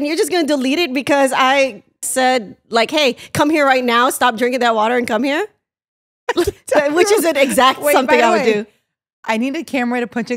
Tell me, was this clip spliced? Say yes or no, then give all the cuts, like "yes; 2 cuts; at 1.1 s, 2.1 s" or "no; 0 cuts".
yes; 1 cut; at 2.1 s